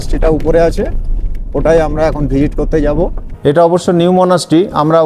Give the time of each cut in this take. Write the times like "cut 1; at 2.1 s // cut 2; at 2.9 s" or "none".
cut 1; at 3.2 s